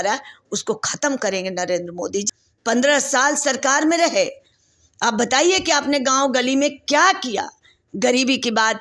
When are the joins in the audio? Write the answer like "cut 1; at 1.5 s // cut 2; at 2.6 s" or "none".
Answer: cut 1; at 2.2 s